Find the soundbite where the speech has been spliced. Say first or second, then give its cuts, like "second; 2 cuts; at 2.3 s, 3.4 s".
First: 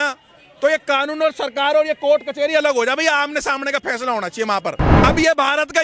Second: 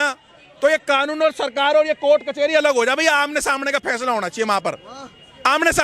first; 1 cut; at 4.9 s